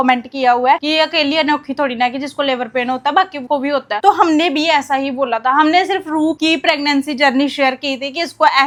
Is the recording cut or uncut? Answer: uncut